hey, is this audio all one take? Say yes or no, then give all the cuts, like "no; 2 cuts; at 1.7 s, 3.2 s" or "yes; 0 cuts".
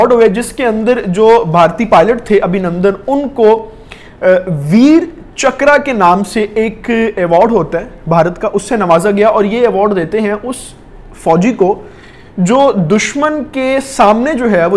yes; 0 cuts